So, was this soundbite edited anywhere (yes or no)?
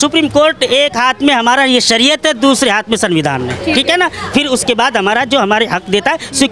no